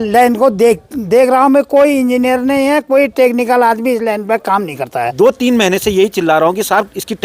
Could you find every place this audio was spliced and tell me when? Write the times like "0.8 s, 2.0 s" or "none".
5.1 s

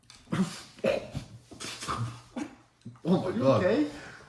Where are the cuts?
none

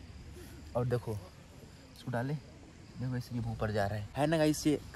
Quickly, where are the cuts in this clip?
4.0 s

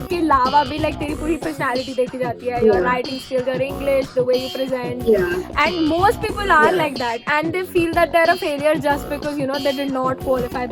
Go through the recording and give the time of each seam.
none

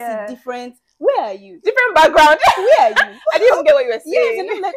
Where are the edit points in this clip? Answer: 1.5 s

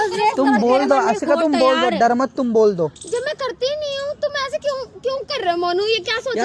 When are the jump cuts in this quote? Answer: none

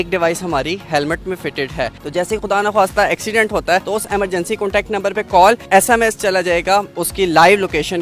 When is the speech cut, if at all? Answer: 1.9 s, 3.8 s, 5.6 s, 6.9 s

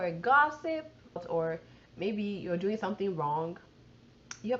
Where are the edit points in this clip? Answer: 1.2 s

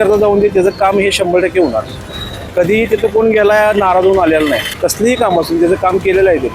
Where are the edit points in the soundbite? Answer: 4.7 s

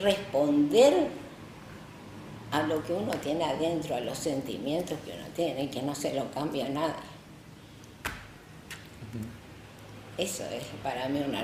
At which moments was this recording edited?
none

